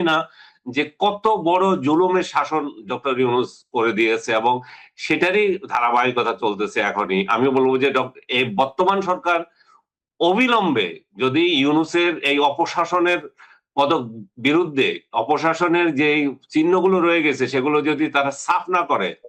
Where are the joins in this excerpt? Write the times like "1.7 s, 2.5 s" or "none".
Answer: none